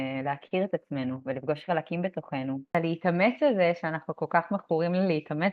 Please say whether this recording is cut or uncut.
cut